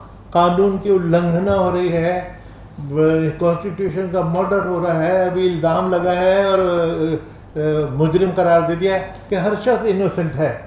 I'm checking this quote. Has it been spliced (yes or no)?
yes